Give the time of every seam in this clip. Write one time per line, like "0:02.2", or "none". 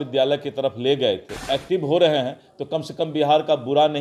0:01.5